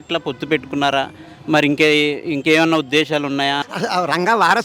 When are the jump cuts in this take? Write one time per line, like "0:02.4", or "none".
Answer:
0:03.6